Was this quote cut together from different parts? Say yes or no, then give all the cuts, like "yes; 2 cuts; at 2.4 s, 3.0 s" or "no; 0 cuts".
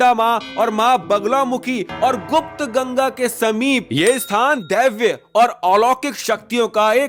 no; 0 cuts